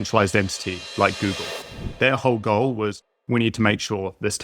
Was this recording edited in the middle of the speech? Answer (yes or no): yes